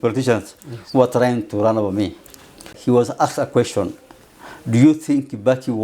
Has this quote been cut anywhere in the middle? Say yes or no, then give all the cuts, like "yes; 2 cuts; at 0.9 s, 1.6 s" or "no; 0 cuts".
yes; 1 cut; at 2.8 s